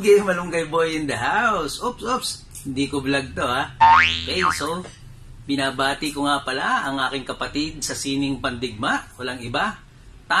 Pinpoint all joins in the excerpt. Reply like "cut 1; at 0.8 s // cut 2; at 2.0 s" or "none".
none